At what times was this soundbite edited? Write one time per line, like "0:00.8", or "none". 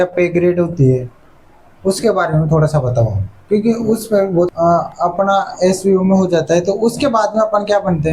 0:04.5